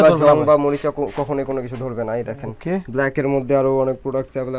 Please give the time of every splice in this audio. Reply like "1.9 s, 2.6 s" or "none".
none